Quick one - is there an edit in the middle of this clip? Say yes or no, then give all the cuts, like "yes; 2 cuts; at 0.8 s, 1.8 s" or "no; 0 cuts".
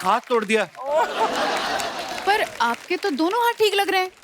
no; 0 cuts